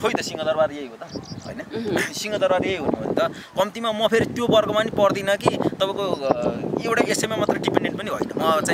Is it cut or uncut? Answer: uncut